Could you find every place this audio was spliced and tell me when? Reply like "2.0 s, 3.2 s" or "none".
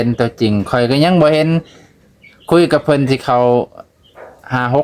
none